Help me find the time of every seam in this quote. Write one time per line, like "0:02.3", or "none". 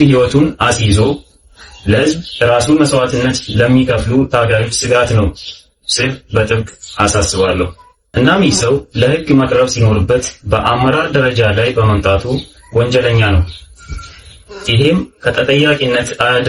none